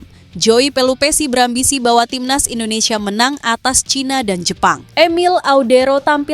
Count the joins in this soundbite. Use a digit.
1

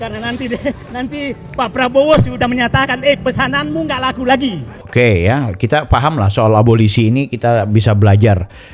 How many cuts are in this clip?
0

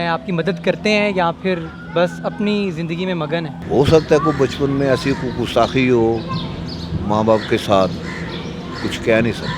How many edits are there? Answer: 1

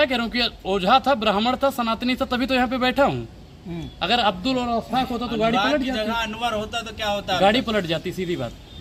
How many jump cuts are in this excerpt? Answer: 0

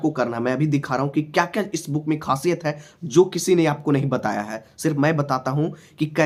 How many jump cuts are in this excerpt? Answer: 0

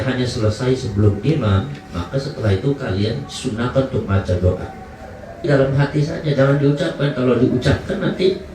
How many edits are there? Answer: 1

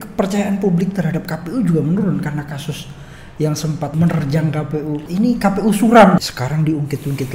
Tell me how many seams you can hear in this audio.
3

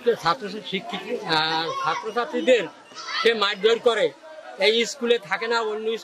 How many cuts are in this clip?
0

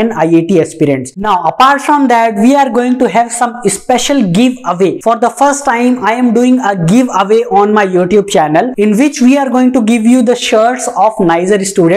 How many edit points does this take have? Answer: 1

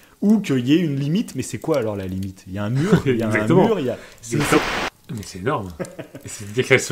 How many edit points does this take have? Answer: 1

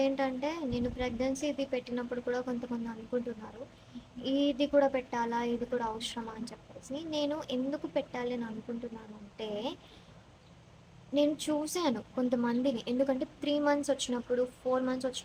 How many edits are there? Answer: 0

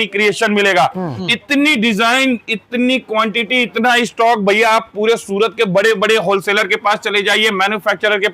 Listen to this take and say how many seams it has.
1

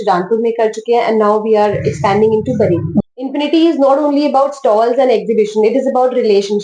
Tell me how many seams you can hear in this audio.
1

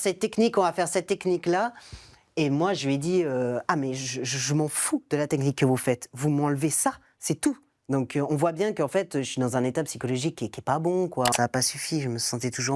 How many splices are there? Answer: 2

